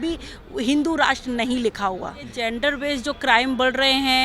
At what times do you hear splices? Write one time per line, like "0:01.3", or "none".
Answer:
0:02.3